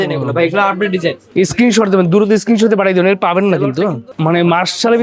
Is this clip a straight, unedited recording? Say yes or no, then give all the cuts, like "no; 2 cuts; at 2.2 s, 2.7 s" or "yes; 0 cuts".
no; 2 cuts; at 1.2 s, 4.1 s